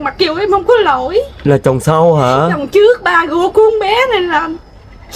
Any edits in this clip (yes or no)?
no